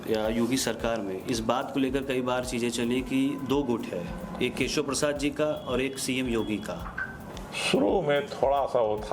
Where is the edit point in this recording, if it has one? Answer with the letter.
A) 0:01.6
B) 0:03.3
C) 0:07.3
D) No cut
C